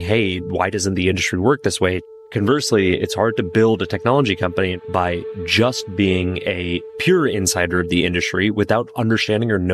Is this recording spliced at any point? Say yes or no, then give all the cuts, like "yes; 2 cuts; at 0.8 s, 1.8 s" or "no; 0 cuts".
yes; 2 cuts; at 2.1 s, 4.8 s